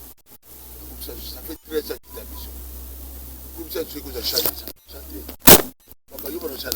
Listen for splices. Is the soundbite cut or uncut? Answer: uncut